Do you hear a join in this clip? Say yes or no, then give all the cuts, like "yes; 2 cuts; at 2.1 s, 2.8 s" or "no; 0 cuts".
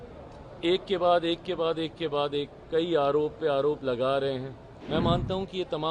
yes; 1 cut; at 4.8 s